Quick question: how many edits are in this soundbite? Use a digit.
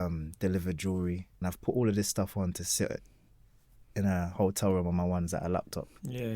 1